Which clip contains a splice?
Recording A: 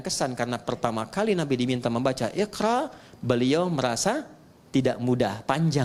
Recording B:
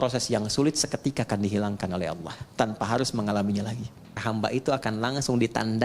B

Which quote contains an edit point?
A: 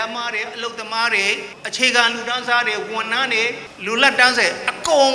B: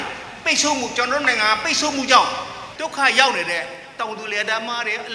A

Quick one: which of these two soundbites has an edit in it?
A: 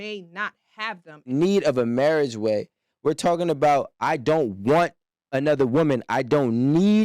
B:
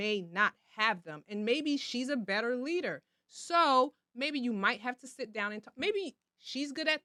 A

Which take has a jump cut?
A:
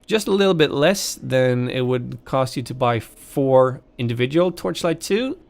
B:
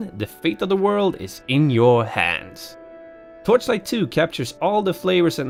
A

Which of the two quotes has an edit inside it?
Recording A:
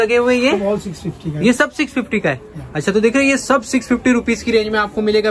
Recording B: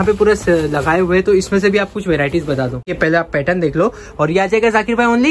B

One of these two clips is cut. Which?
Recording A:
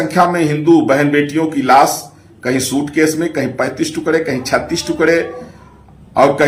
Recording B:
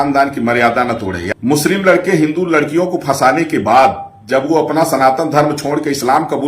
B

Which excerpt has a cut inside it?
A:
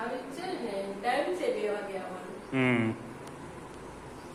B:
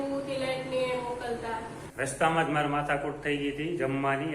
B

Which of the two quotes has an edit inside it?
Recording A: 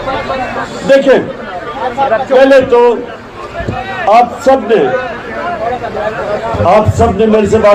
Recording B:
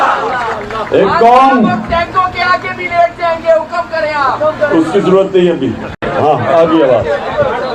B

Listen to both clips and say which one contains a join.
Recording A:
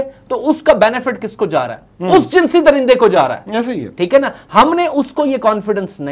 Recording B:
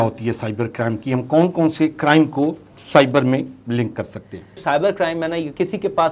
B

